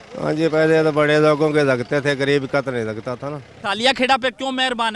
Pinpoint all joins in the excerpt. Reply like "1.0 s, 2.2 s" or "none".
3.5 s